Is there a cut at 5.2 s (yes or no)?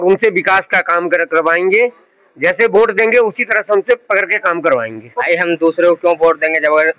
yes